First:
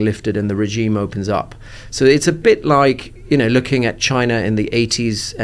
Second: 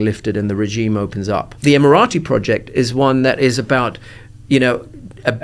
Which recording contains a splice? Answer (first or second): second